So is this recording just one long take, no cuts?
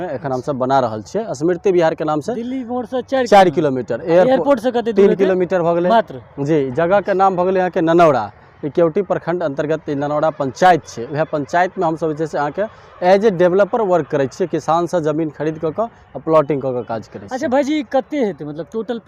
yes; 0 cuts

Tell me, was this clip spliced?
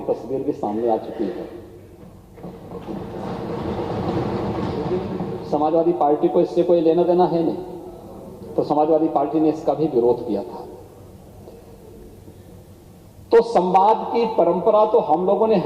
yes; 1 cut; at 5.2 s

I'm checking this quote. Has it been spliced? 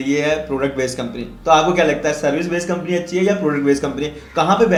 no; 0 cuts

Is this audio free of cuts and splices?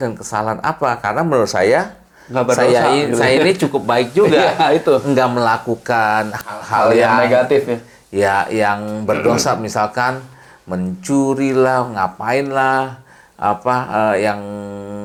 yes; 0 cuts

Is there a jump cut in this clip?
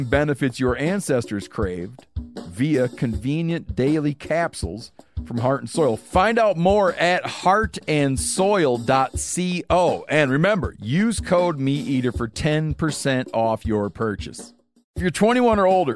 yes; 1 cut; at 15.0 s

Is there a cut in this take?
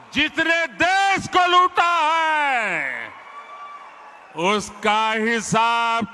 no; 0 cuts

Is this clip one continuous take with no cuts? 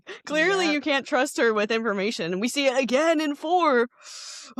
yes; 0 cuts

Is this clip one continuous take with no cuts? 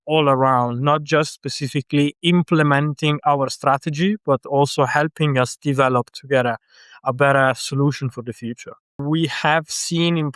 no; 1 cut; at 9.0 s

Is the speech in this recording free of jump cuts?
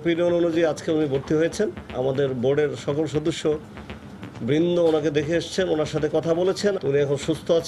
no; 1 cut; at 6.8 s

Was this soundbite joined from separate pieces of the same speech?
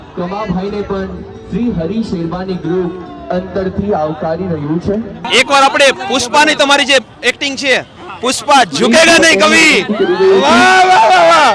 no; 0 cuts

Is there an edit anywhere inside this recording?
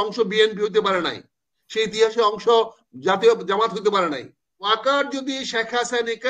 yes; 1 cut; at 4.6 s

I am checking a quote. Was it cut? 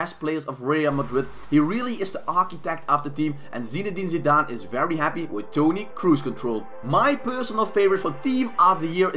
no; 0 cuts

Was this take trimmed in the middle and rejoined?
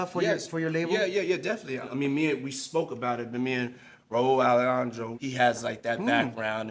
yes; 2 cuts; at 1.9 s, 5.1 s

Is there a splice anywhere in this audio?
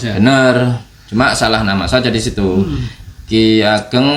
no; 0 cuts

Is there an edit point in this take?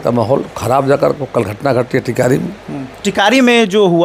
no; 0 cuts

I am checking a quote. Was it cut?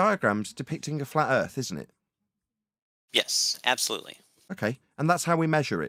no; 0 cuts

